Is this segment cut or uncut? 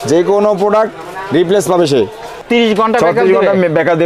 cut